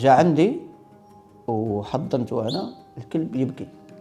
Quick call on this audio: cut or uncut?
uncut